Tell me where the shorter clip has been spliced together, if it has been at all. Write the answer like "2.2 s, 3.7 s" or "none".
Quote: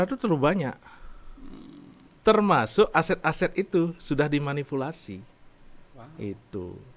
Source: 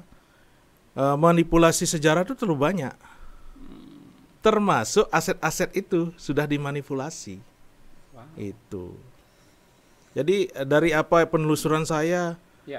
none